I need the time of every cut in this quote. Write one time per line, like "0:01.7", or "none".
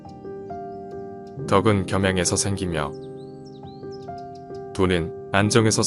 none